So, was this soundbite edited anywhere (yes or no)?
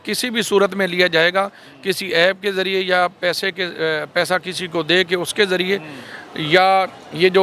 no